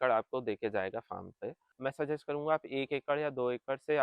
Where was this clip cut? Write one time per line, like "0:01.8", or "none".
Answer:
0:01.7

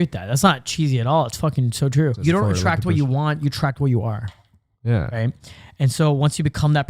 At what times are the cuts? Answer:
0:02.2

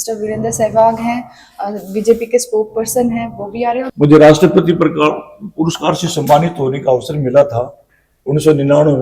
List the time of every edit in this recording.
0:03.8

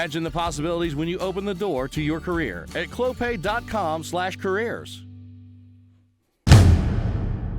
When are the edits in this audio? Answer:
0:06.3

